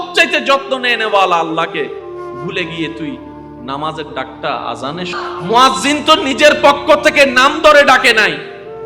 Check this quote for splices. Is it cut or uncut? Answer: cut